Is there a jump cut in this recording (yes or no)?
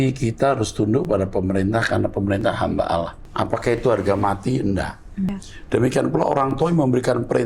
yes